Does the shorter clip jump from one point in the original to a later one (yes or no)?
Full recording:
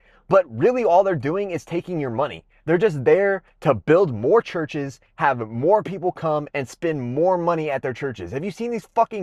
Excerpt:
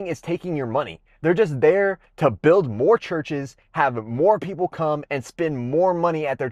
no